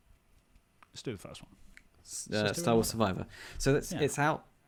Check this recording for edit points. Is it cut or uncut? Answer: uncut